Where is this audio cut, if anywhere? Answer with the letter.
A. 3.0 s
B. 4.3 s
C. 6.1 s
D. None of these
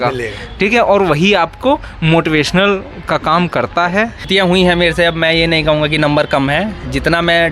B